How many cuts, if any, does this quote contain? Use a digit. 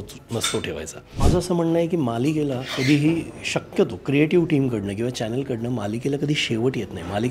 1